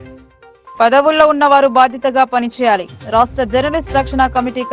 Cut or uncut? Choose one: uncut